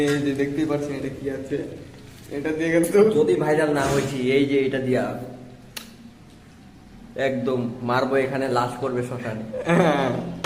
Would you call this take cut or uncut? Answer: uncut